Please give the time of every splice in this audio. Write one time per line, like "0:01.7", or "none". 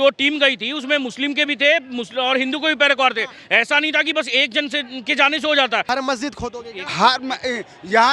0:05.9